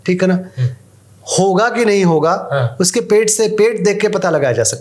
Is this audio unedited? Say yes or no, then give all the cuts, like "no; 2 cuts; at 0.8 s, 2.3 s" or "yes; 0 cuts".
yes; 0 cuts